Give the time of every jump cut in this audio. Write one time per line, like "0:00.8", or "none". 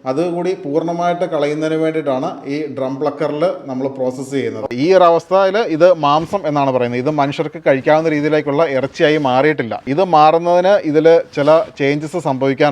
0:04.7
0:09.9